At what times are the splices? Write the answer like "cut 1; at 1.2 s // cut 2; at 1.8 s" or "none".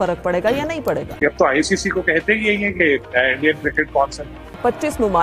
cut 1; at 1.1 s // cut 2; at 4.5 s